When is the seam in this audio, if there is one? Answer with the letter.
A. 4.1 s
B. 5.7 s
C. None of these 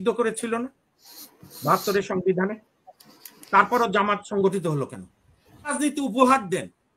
B